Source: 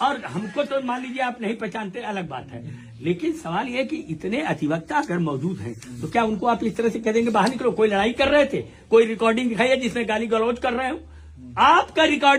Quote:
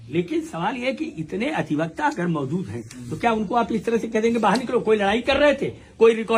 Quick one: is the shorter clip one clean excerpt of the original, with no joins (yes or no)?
yes